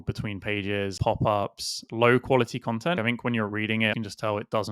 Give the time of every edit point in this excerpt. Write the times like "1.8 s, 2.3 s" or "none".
1.0 s, 1.8 s, 3.0 s, 3.9 s